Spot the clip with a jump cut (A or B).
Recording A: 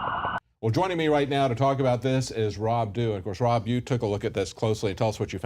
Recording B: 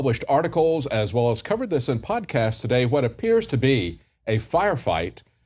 A